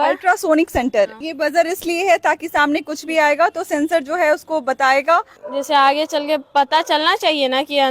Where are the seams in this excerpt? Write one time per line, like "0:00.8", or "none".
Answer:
0:01.2
0:05.4